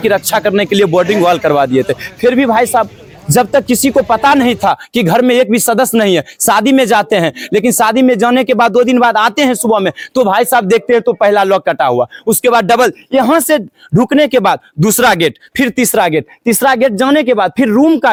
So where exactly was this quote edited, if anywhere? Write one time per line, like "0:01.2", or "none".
none